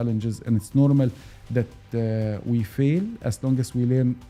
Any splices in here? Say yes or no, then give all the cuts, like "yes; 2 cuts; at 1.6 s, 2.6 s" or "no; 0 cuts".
no; 0 cuts